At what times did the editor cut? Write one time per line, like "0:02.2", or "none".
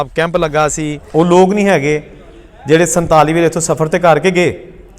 0:01.0